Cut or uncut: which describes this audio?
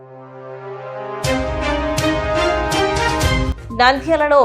cut